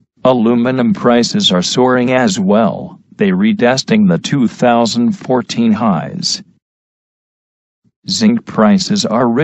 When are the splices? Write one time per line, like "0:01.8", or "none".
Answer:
none